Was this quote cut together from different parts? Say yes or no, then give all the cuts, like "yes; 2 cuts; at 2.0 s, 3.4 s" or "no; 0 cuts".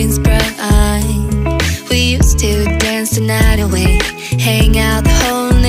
no; 0 cuts